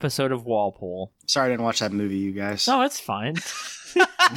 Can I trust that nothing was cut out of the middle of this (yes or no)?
no